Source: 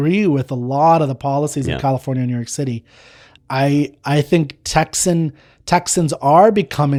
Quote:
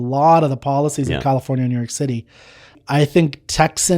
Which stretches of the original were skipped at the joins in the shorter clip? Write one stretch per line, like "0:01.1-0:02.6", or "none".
0:03.4-0:04.0